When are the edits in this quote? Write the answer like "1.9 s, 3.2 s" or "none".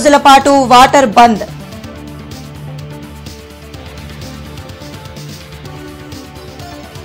none

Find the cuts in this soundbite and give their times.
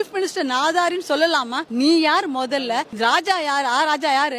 1.6 s, 2.9 s

